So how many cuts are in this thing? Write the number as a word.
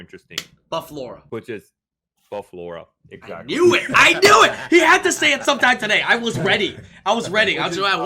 one